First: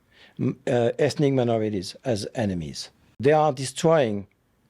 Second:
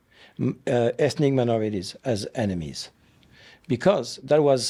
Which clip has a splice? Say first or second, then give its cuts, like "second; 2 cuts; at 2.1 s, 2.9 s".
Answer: first; 1 cut; at 3.2 s